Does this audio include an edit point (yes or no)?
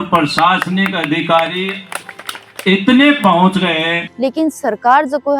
yes